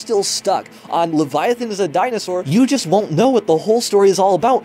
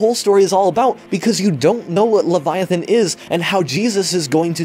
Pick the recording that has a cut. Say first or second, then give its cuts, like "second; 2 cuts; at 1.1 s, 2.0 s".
first; 1 cut; at 2.4 s